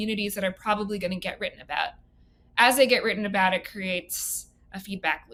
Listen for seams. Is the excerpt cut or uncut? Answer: uncut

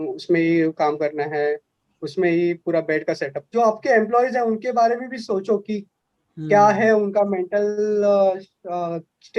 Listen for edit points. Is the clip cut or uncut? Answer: cut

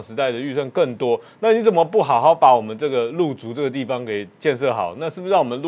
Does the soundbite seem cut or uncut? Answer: uncut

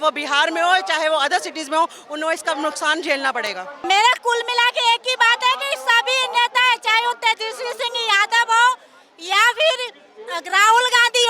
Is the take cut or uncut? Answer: cut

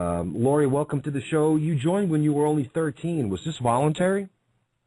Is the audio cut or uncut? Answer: cut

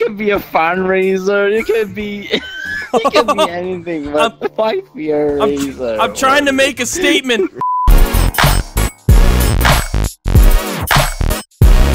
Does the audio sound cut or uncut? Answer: cut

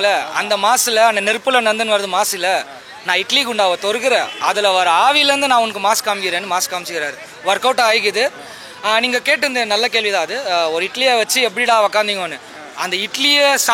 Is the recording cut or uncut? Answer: uncut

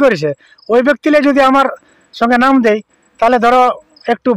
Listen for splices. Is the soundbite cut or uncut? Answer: uncut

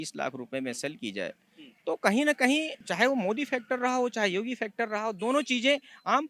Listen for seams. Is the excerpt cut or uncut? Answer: cut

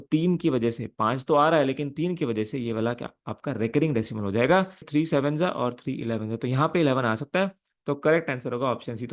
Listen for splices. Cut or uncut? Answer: cut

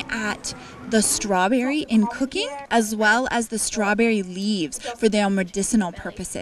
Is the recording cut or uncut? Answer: cut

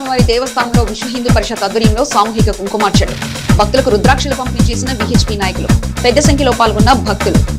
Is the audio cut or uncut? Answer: uncut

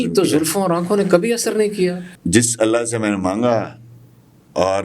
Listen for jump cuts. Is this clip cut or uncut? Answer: cut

